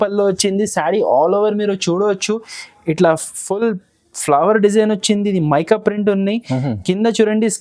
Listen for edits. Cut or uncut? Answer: uncut